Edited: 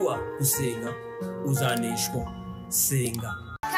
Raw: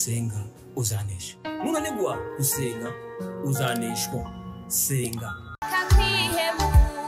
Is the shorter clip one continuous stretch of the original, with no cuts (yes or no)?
yes